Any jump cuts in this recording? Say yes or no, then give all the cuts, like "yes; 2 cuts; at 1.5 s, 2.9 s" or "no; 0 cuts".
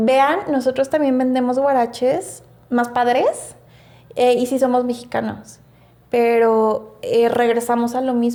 no; 0 cuts